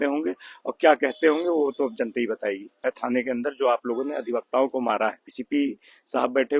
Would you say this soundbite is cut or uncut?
cut